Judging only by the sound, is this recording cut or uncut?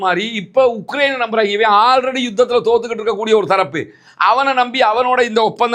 uncut